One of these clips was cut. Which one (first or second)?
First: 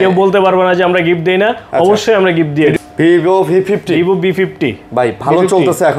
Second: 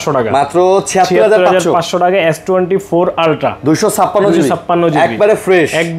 first